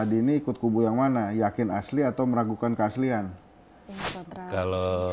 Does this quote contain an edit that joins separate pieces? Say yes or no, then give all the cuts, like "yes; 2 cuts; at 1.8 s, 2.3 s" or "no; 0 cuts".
no; 0 cuts